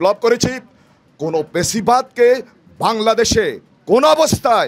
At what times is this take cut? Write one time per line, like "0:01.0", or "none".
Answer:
none